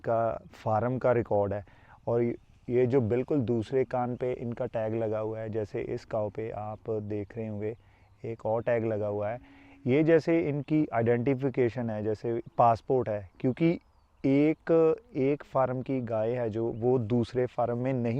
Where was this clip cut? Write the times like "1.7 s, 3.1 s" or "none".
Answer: none